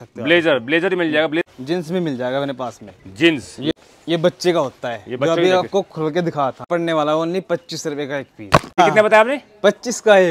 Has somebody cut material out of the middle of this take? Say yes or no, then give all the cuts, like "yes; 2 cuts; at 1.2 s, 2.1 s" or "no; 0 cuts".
yes; 4 cuts; at 1.4 s, 3.7 s, 6.7 s, 8.8 s